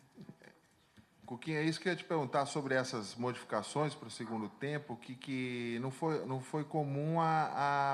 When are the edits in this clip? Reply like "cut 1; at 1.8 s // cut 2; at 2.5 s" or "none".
cut 1; at 2.6 s